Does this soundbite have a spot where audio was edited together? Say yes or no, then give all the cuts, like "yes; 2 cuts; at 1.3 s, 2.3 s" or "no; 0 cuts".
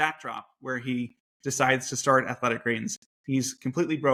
no; 0 cuts